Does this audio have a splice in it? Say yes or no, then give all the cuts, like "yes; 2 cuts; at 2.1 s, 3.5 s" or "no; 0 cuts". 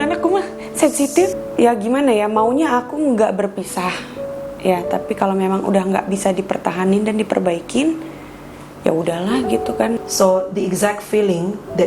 yes; 2 cuts; at 1.3 s, 10.0 s